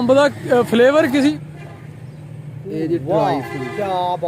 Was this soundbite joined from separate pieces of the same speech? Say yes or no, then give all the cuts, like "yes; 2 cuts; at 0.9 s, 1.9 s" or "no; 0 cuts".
yes; 1 cut; at 1.4 s